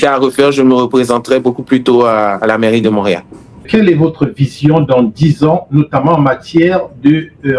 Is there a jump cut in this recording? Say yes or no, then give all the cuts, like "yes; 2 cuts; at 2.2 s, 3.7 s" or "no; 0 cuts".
no; 0 cuts